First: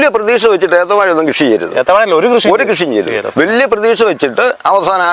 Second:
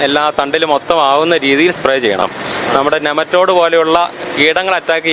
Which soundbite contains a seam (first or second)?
second